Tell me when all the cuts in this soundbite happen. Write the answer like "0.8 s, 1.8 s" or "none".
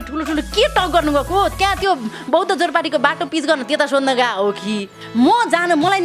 5.0 s